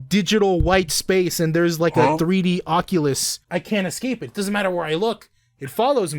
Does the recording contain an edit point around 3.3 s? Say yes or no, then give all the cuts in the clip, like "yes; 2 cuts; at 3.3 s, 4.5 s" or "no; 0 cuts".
yes; 1 cut; at 3.3 s